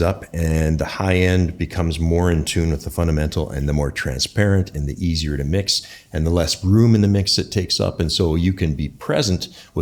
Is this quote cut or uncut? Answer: uncut